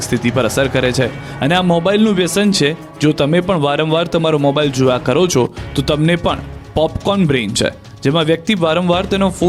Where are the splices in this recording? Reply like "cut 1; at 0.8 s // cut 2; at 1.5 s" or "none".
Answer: none